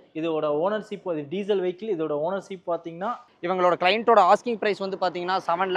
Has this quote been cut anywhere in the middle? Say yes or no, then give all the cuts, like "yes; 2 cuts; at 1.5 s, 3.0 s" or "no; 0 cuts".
yes; 1 cut; at 3.3 s